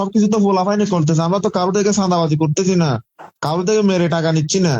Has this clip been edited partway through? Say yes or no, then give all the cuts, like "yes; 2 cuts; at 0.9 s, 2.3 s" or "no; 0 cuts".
no; 0 cuts